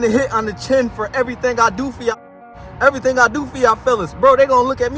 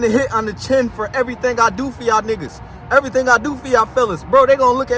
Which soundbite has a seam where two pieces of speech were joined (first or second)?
first